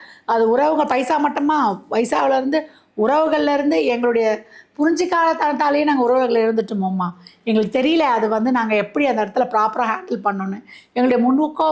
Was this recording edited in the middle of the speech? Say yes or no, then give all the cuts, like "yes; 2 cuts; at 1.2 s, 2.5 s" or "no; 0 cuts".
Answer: no; 0 cuts